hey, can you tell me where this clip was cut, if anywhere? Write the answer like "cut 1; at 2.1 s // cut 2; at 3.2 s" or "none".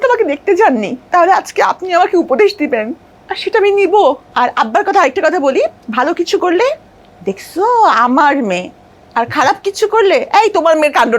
cut 1; at 1.0 s // cut 2; at 4.3 s